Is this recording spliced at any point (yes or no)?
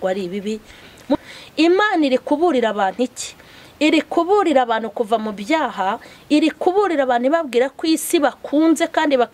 yes